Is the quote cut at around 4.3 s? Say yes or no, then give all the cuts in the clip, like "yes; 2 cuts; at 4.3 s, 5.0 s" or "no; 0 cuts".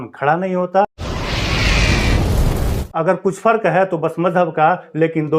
no; 2 cuts; at 1.0 s, 2.8 s